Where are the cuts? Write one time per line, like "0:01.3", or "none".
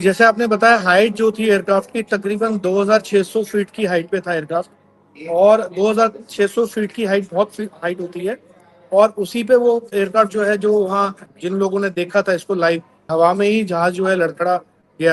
0:11.3
0:13.0